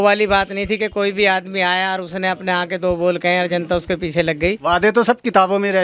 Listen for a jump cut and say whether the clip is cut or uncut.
cut